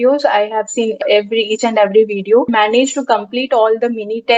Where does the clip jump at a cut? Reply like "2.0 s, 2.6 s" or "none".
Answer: 1.0 s, 2.5 s

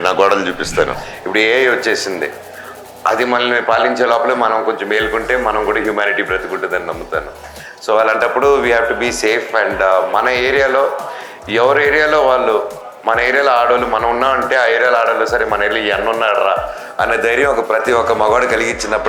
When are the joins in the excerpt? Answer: 1.1 s

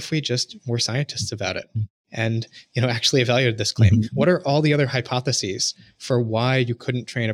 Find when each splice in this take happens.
none

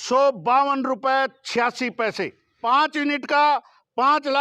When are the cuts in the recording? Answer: 2.5 s

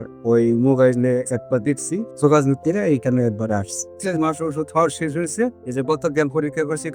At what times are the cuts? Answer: 2.1 s, 3.9 s

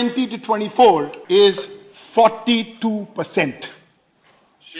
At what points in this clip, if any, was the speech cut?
1.2 s

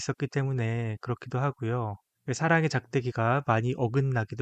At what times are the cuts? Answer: 2.1 s

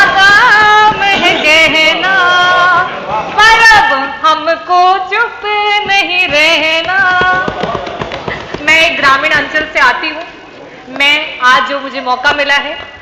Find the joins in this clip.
none

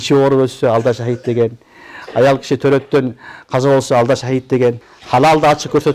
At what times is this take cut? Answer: 4.9 s

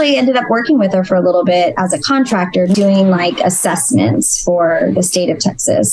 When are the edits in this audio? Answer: 2.8 s

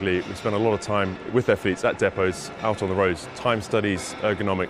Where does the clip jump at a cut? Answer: 1.2 s

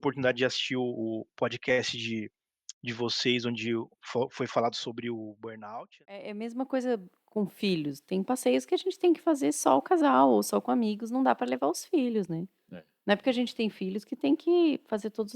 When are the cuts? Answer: 6.4 s

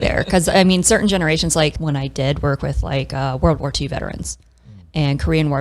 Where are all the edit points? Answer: 1.8 s

